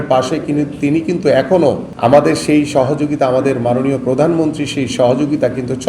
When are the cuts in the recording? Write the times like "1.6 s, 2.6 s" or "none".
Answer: 1.9 s